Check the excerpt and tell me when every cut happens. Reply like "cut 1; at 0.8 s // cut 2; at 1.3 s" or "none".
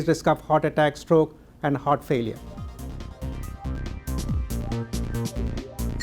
cut 1; at 2.5 s